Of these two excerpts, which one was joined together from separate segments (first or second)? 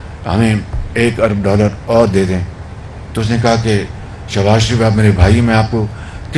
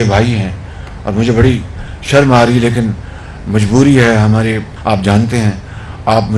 second